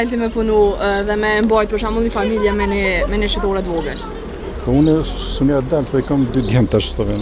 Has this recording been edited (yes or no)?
no